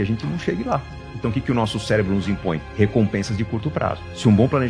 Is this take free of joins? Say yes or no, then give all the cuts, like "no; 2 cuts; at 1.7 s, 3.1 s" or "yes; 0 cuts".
yes; 0 cuts